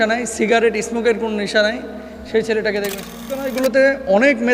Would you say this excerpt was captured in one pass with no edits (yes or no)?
no